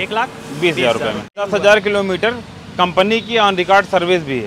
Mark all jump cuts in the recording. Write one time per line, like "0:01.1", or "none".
0:01.5

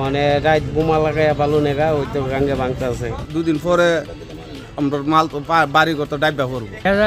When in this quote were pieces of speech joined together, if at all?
0:03.2

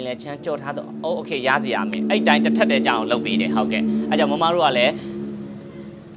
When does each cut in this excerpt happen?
none

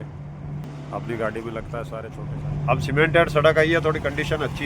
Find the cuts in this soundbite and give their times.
0:02.0

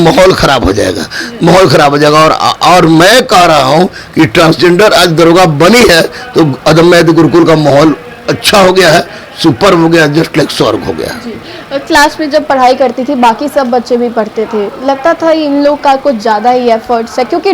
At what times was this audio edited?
none

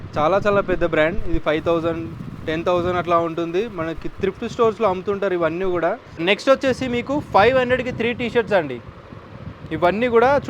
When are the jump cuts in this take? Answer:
0:06.1

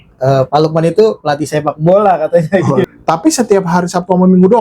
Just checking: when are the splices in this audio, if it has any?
0:02.8

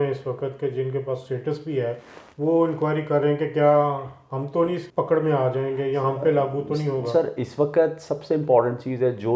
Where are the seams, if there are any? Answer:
none

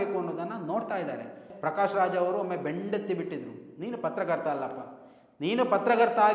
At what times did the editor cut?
0:01.5

